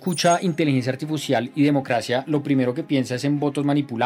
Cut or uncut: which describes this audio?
uncut